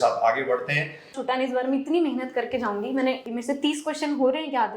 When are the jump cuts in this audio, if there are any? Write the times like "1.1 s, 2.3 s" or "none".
1.1 s, 3.2 s